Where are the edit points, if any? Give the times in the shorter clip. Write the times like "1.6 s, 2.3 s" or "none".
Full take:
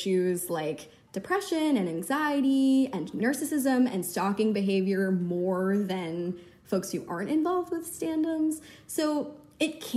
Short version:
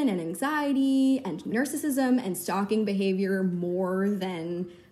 none